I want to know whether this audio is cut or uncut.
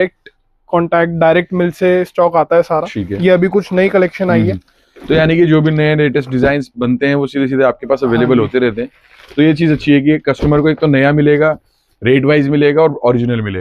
uncut